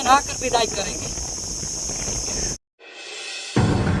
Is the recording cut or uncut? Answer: uncut